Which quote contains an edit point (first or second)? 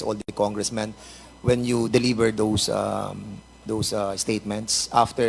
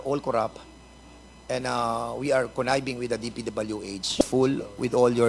second